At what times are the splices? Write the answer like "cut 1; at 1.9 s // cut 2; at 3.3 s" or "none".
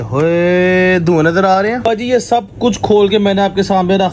cut 1; at 1.8 s